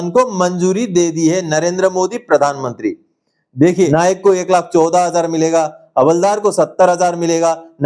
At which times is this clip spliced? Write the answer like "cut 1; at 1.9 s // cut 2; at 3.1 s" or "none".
cut 1; at 3.9 s

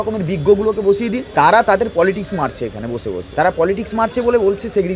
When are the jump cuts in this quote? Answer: cut 1; at 1.2 s // cut 2; at 3.2 s

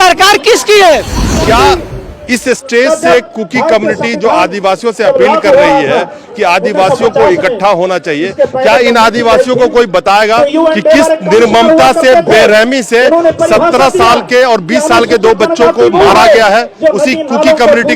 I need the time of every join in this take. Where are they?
cut 1; at 1.3 s

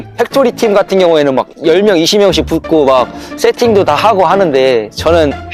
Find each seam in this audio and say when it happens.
none

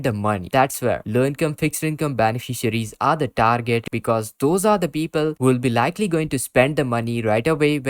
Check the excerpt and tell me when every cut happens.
cut 1; at 3.8 s

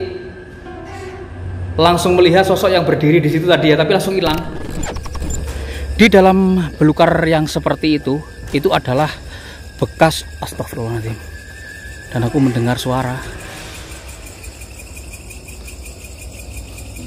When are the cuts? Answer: cut 1; at 4.9 s

